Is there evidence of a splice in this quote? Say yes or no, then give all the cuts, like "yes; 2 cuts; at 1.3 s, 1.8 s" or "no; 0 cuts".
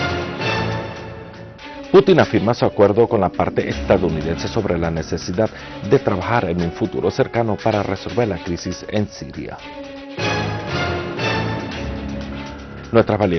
yes; 1 cut; at 1.9 s